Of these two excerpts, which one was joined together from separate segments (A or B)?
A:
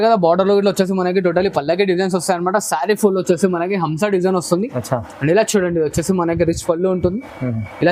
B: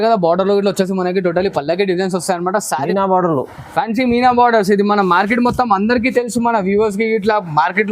B